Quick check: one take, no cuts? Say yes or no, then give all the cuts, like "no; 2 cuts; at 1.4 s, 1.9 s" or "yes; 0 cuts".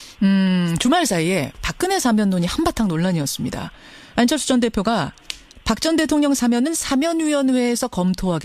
yes; 0 cuts